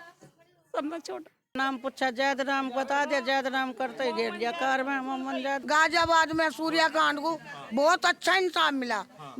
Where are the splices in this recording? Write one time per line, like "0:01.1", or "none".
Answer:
0:01.6
0:05.6